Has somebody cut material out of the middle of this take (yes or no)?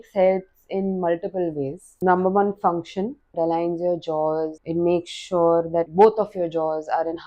yes